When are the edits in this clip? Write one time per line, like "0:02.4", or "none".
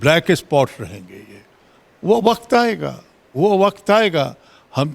none